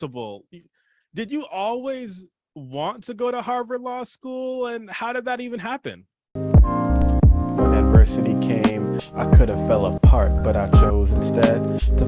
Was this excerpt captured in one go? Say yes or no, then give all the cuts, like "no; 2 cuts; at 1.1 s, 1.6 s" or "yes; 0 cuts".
no; 1 cut; at 6.3 s